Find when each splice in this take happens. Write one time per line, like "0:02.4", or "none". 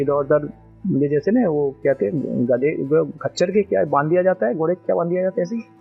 none

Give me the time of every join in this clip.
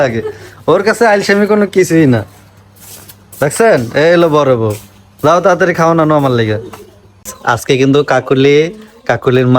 0:07.4

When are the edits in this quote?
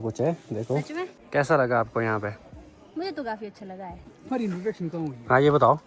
0:01.2
0:04.1

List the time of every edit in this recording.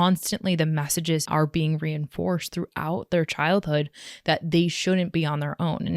0:01.2

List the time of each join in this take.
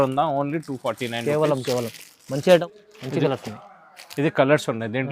0:02.6

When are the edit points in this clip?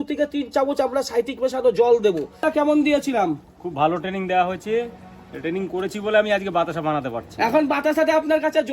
0:02.5

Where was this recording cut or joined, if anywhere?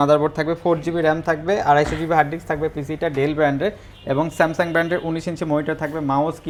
none

